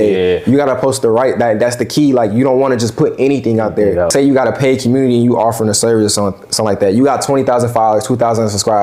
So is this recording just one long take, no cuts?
no; 1 cut; at 4.1 s

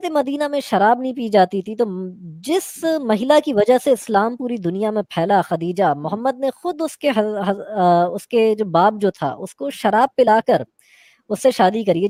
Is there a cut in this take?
no; 0 cuts

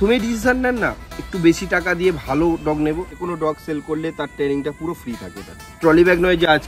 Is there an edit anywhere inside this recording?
yes; 2 cuts; at 3.2 s, 5.8 s

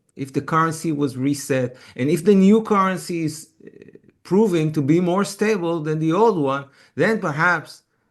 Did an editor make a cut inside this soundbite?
no; 0 cuts

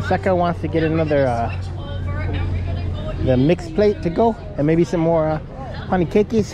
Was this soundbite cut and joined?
no; 0 cuts

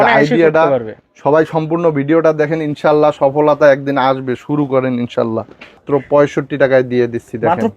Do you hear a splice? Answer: yes; 1 cut; at 5.8 s

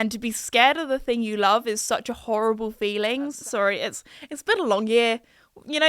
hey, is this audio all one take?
no; 1 cut; at 3.4 s

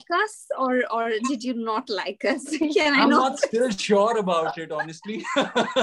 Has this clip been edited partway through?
no; 0 cuts

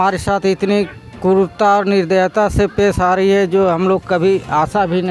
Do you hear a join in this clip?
no; 0 cuts

